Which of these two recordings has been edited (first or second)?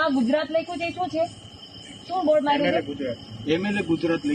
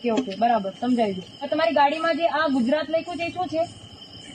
second